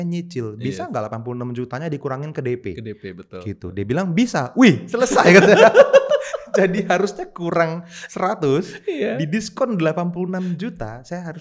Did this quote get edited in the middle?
no; 0 cuts

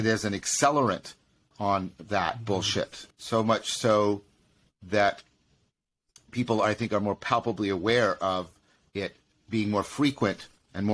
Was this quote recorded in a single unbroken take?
no; 2 cuts; at 1.5 s, 3.0 s

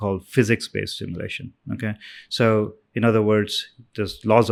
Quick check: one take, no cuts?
yes; 0 cuts

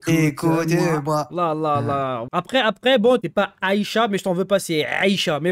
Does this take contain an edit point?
yes; 2 cuts; at 2.2 s, 3.2 s

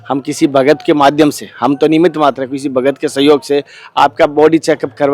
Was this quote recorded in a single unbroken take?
yes; 0 cuts

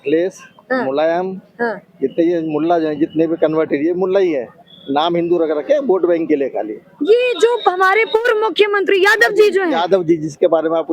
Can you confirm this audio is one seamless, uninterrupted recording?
yes; 0 cuts

